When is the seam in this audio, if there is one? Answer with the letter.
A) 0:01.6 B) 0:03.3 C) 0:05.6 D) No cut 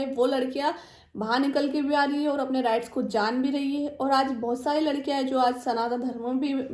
D